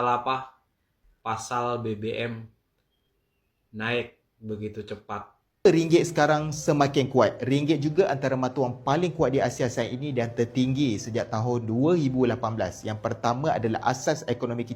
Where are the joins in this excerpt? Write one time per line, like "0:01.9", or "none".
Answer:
0:05.7